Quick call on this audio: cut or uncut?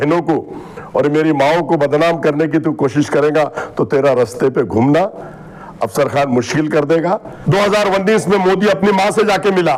cut